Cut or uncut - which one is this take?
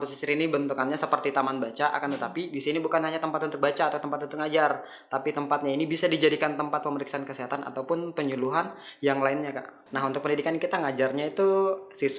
cut